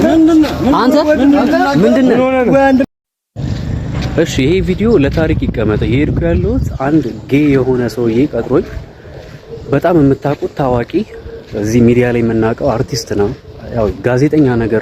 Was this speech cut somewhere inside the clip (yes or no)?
yes